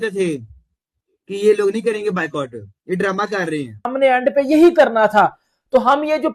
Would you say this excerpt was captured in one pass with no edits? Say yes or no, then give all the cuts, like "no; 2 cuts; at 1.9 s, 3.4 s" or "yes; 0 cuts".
no; 1 cut; at 3.9 s